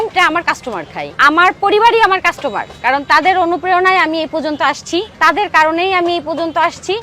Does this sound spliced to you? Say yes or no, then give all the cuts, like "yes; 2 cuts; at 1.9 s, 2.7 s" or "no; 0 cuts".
no; 0 cuts